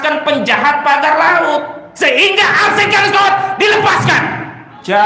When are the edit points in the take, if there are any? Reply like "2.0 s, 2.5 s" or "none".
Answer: 1.9 s